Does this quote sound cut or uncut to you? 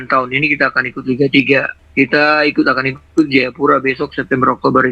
cut